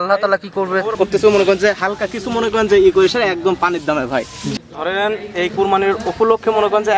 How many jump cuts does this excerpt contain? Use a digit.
2